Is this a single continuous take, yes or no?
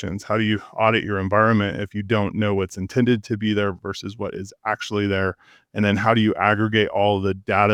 yes